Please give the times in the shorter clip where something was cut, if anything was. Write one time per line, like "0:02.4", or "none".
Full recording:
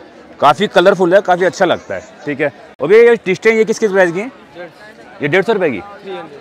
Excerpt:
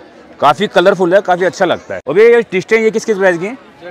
0:01.9